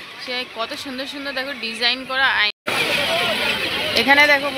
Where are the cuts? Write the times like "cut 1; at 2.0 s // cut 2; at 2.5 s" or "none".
cut 1; at 2.5 s